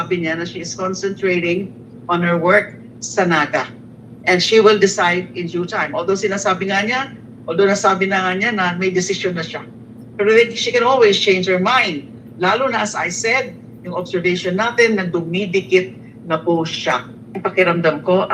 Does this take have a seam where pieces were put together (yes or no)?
yes